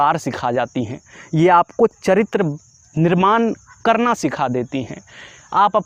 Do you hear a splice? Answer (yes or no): no